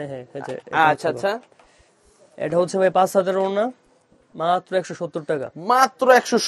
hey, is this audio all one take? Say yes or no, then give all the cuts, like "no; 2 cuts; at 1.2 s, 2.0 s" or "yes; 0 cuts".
yes; 0 cuts